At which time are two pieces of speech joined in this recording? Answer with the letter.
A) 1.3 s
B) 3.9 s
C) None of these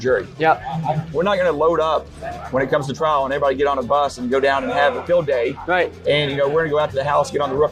C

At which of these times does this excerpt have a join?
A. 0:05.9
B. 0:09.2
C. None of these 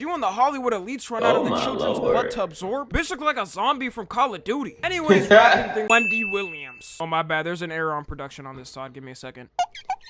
A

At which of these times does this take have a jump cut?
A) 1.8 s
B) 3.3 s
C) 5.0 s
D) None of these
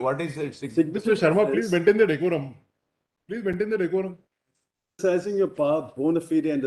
C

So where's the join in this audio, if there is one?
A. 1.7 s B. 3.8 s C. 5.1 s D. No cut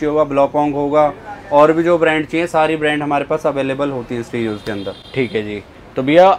D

